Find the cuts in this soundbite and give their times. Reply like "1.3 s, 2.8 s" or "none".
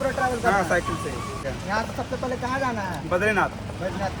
1.5 s